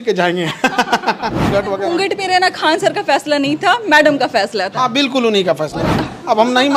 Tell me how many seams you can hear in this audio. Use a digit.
2